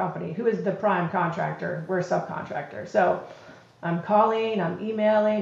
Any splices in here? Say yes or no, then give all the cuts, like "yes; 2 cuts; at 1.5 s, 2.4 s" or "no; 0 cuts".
no; 0 cuts